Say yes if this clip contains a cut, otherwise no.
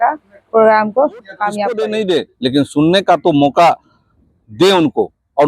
yes